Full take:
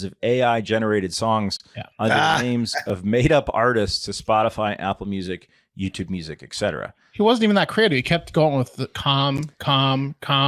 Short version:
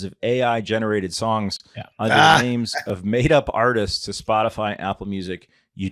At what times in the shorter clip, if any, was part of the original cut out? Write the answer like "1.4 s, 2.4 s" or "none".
none